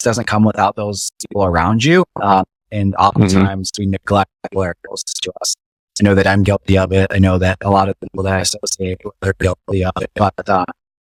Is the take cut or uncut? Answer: uncut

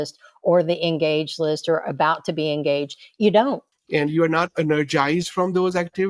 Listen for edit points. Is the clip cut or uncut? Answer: cut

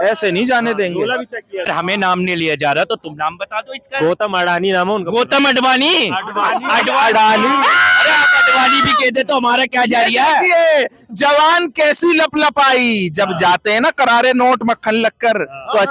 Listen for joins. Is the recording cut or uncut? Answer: cut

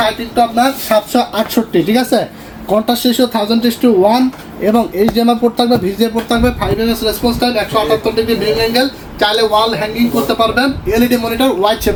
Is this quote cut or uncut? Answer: uncut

